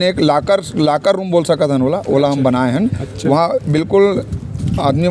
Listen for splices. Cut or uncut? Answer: uncut